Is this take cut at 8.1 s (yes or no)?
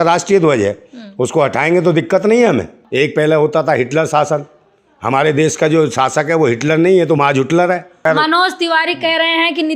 yes